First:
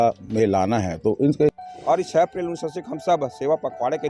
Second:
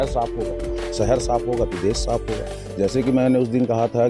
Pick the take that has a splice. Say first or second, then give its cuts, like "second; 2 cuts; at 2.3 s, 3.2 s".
first; 1 cut; at 1.6 s